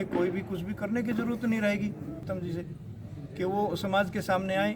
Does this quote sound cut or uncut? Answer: cut